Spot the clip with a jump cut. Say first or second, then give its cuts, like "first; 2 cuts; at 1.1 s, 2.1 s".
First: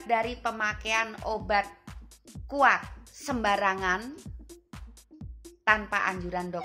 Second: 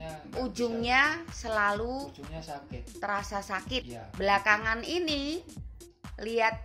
second; 1 cut; at 4.0 s